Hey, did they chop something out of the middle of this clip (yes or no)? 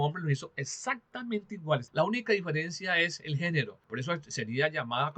yes